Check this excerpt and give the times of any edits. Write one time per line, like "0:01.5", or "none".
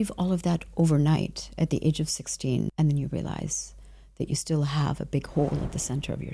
0:02.7